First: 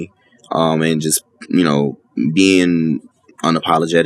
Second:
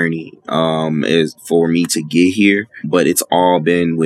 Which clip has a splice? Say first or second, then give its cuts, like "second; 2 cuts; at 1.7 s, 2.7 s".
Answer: second; 1 cut; at 2.8 s